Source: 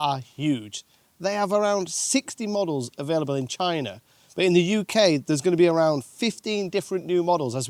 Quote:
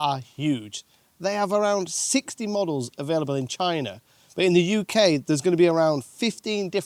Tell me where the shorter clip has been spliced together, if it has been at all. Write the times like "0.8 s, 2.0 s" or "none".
none